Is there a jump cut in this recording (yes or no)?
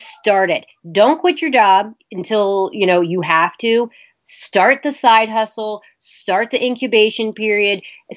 yes